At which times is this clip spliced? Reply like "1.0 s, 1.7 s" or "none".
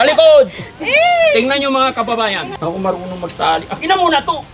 2.5 s